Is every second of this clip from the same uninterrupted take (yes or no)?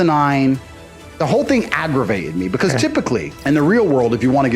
no